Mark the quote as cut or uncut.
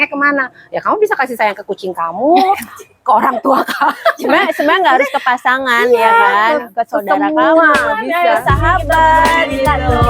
uncut